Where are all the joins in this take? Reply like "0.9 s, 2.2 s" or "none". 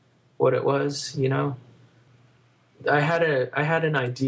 2.2 s